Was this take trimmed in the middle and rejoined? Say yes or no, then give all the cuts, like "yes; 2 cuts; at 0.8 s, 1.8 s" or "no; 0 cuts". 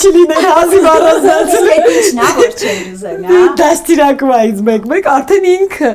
no; 0 cuts